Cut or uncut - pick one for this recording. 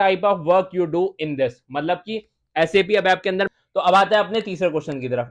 cut